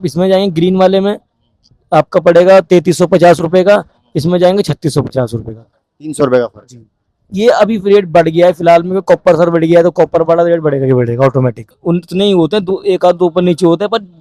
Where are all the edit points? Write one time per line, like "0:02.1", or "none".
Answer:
0:11.7